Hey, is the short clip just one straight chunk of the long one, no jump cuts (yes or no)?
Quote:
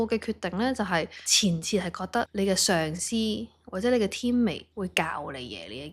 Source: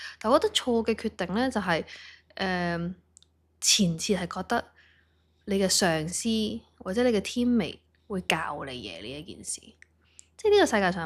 no